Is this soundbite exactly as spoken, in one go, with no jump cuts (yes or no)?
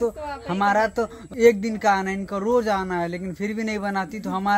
yes